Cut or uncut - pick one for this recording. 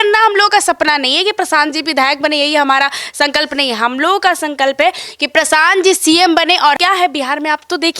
cut